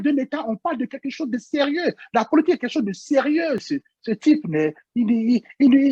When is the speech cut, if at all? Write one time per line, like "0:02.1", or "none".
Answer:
0:03.6